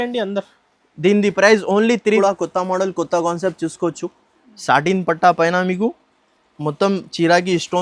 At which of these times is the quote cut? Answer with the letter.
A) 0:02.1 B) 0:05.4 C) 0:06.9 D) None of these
A